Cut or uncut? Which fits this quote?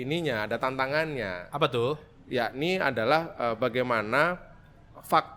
uncut